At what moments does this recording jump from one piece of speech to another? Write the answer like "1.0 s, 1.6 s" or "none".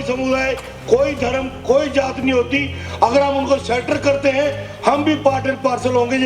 none